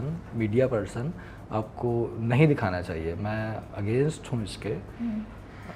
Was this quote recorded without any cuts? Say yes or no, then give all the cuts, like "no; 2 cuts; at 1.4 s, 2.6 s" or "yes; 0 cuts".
yes; 0 cuts